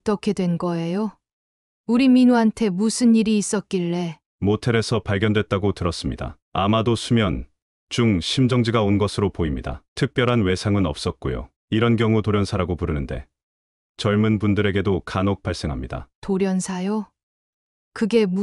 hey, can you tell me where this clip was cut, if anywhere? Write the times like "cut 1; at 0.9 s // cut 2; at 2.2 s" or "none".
cut 1; at 4.2 s